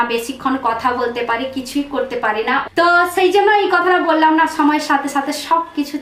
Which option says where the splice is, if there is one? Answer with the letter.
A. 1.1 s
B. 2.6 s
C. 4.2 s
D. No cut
B